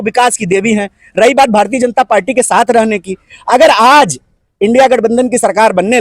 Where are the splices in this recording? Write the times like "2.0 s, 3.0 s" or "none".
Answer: none